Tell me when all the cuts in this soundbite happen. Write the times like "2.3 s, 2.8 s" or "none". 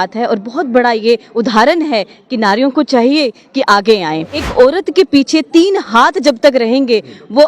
4.4 s